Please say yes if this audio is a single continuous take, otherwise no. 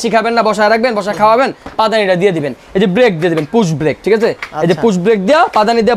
yes